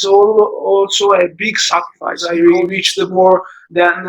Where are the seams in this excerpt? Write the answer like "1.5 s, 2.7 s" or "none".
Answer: 2.3 s